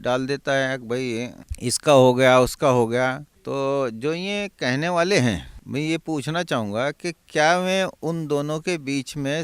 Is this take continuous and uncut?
no; 3 cuts; at 1.4 s, 3.3 s, 5.5 s

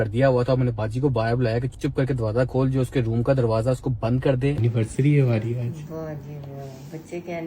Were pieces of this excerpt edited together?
yes; 1 cut; at 4.6 s

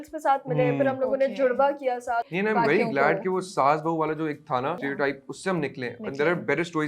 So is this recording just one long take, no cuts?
no; 2 cuts; at 2.3 s, 4.8 s

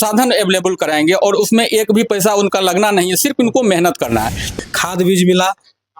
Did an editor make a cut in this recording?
yes; 1 cut; at 4.5 s

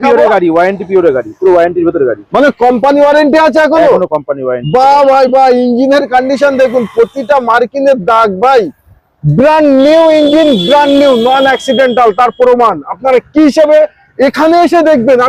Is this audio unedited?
yes; 0 cuts

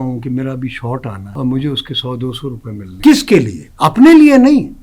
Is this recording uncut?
no; 3 cuts; at 1.2 s, 2.9 s, 3.6 s

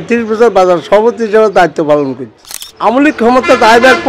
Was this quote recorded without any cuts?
no; 1 cut; at 2.9 s

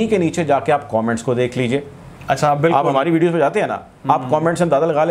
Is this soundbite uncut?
yes; 0 cuts

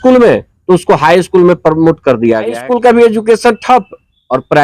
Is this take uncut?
no; 1 cut; at 2.5 s

